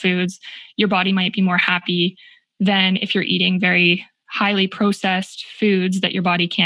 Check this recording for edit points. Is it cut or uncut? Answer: uncut